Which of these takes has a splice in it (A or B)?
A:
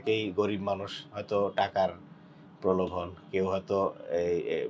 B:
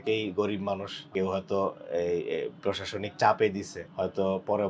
B